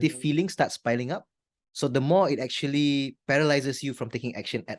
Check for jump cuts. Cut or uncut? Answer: uncut